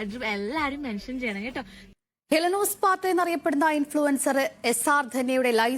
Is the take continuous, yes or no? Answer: no